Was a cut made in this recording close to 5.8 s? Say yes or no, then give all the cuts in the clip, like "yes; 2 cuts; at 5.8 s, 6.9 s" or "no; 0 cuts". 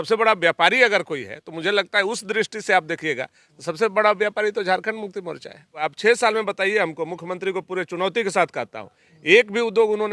yes; 1 cut; at 5.8 s